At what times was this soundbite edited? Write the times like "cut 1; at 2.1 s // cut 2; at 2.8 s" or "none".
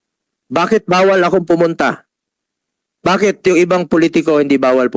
none